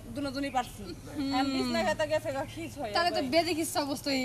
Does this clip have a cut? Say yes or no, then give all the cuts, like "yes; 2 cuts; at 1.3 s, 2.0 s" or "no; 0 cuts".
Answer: no; 0 cuts